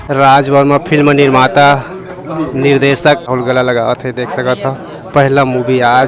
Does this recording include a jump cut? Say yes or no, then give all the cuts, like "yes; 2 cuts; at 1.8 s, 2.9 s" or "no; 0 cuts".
yes; 1 cut; at 3.3 s